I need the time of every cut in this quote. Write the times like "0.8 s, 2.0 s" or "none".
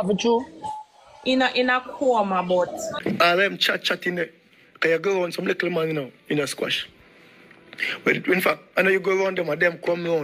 2.9 s